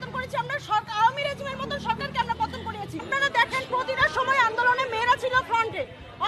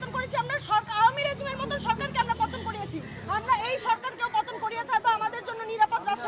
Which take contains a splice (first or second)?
first